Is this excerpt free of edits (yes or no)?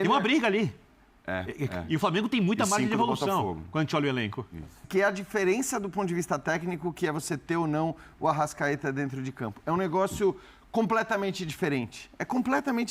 no